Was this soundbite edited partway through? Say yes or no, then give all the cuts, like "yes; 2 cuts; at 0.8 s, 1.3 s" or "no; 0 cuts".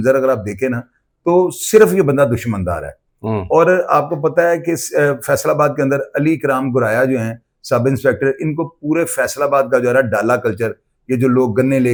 no; 0 cuts